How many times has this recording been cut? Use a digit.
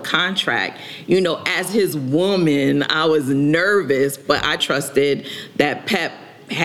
1